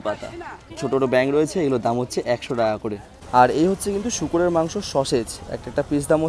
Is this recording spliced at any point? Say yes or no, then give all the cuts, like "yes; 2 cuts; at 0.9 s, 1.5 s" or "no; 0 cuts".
yes; 2 cuts; at 0.7 s, 3.1 s